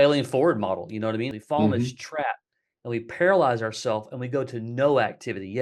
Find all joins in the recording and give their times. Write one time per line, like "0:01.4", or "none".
0:01.4

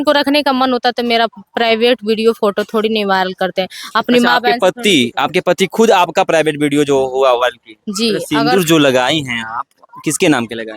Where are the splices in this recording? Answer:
0:08.2

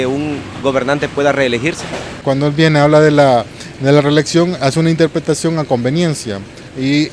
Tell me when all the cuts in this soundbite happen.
0:02.2

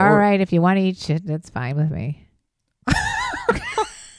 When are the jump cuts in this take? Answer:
none

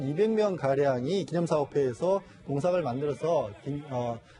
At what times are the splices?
0:02.9

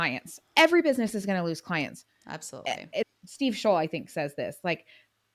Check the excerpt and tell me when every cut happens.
none

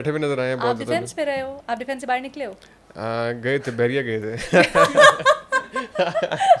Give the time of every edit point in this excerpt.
none

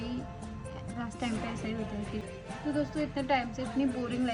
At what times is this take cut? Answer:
0:02.3

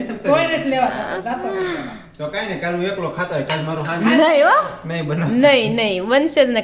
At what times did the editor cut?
none

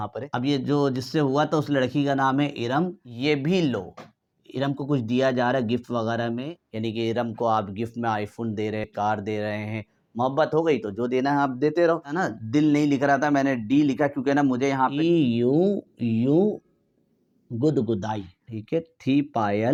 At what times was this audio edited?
none

